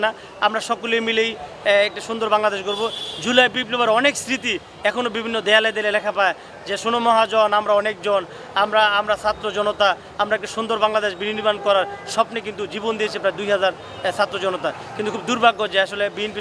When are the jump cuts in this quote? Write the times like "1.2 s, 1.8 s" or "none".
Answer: none